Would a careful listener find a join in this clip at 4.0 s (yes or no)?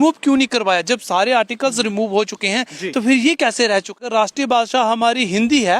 yes